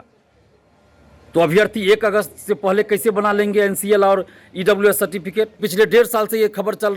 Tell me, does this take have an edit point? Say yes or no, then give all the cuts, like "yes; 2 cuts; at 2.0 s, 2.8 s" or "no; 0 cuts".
yes; 1 cut; at 5.6 s